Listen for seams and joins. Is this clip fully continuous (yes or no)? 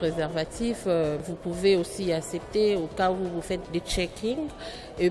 no